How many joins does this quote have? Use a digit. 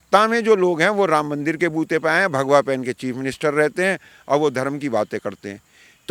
0